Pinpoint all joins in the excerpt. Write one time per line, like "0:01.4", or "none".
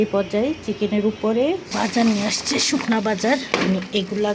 0:01.7